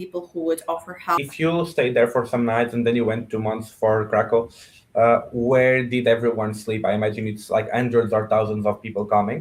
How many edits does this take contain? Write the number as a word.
one